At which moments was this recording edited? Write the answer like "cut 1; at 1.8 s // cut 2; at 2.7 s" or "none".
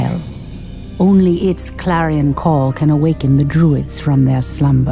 none

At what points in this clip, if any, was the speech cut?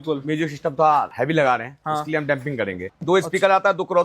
cut 1; at 2.9 s

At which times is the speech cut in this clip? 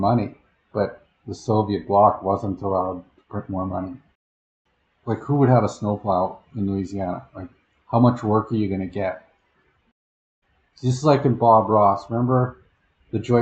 cut 1; at 4.3 s // cut 2; at 10.0 s

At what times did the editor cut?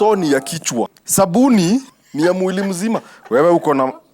cut 1; at 1.0 s // cut 2; at 2.0 s

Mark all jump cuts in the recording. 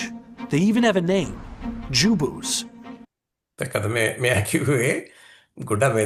none

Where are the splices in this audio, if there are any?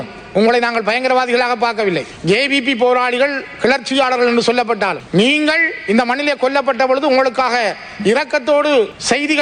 none

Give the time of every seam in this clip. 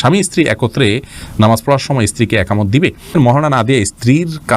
cut 1; at 3.1 s

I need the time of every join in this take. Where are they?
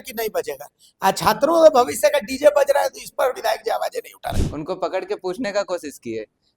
cut 1; at 4.5 s

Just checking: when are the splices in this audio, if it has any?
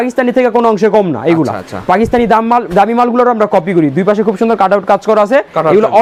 none

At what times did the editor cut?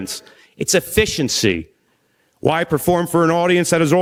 none

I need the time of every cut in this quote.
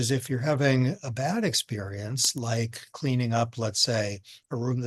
none

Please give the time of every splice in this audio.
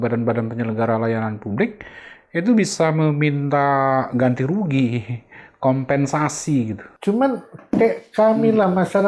none

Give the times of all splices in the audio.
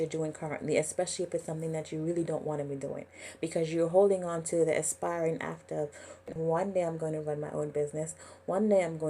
cut 1; at 6.2 s

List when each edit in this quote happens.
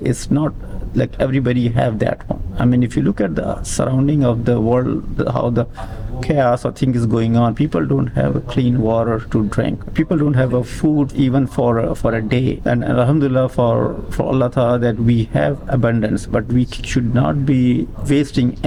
none

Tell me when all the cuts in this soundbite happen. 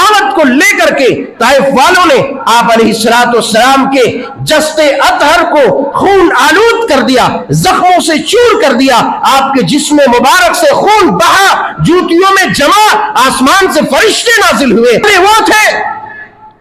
cut 1; at 15.0 s

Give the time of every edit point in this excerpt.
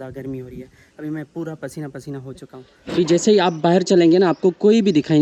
none

